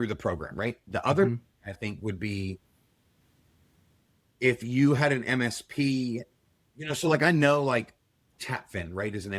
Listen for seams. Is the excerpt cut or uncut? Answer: uncut